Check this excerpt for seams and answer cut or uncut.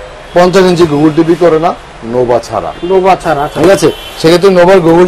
uncut